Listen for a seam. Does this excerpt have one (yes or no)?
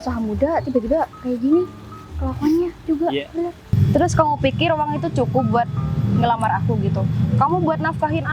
yes